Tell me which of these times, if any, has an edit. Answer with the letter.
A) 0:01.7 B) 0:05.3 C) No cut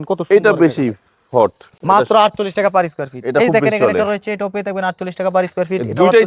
C